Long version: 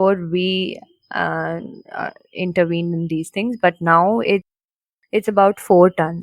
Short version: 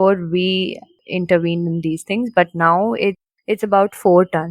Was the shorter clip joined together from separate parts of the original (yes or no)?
yes